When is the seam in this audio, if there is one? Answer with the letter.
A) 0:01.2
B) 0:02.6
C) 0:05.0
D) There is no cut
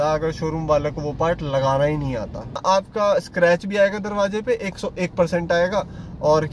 B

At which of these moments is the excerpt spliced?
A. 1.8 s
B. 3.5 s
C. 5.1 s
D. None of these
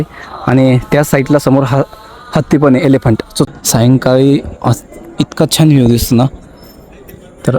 B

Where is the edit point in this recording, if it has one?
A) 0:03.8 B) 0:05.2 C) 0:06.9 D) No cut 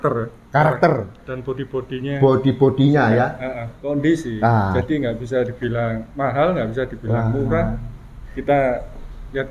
A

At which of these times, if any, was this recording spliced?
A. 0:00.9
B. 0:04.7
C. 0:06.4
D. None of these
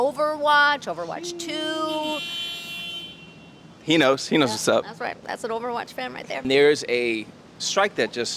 C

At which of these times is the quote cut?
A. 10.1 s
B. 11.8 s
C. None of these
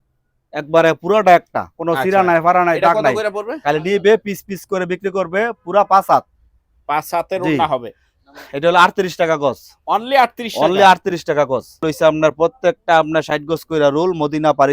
B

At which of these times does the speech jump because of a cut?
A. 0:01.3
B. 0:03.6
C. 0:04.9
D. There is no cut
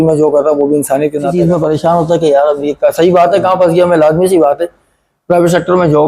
A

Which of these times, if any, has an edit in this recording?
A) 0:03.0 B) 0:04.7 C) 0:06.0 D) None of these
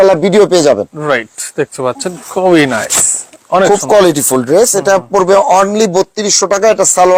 D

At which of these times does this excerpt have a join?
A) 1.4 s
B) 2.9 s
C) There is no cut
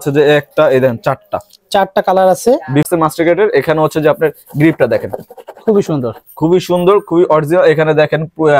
B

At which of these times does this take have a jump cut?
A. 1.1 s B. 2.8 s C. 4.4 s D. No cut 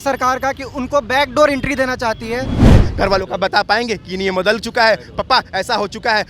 B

